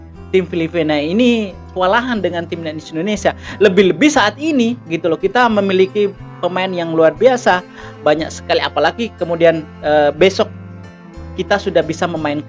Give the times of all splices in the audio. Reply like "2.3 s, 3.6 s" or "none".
none